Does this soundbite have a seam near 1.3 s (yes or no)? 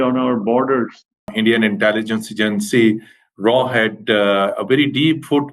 yes